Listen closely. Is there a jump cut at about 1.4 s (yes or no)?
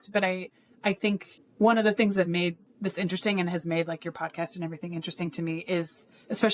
yes